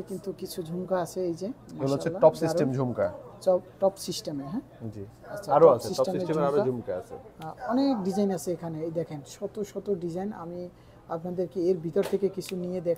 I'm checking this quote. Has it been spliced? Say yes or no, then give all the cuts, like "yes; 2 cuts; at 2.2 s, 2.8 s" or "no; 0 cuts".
no; 0 cuts